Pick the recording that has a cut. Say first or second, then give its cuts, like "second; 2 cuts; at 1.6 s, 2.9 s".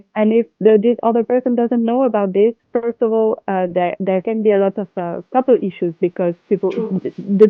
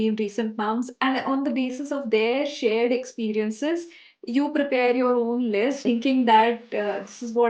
second; 2 cuts; at 0.9 s, 5.8 s